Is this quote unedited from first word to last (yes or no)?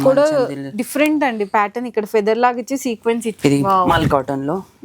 no